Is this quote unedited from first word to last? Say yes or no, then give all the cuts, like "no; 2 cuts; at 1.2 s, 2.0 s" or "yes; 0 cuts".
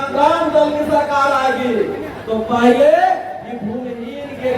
yes; 0 cuts